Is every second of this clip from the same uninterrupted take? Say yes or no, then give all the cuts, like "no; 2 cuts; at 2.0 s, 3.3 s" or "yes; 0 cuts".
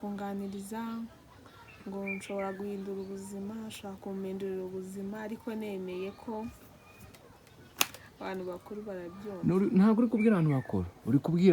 yes; 0 cuts